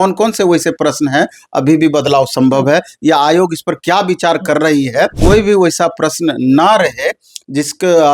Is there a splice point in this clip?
yes; 1 cut; at 5.1 s

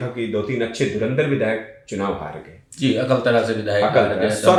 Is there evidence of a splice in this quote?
no; 0 cuts

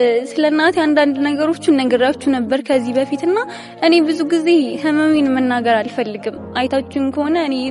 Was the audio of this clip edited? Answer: no; 0 cuts

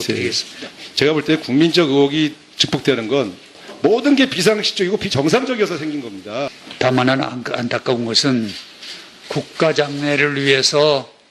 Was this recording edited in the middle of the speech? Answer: yes; 1 cut; at 7.1 s

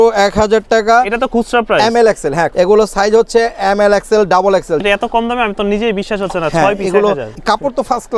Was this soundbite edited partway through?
yes; 3 cuts; at 2.5 s, 4.8 s, 7.3 s

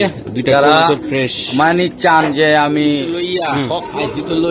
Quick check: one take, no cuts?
no; 1 cut; at 3.6 s

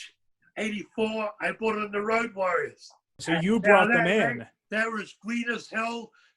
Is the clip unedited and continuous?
yes; 0 cuts

